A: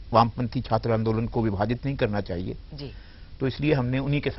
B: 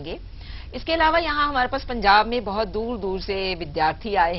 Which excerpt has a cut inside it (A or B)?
B